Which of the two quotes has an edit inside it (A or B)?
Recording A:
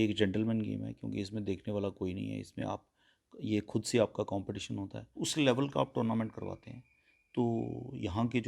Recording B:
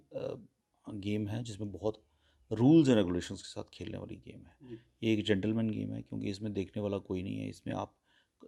A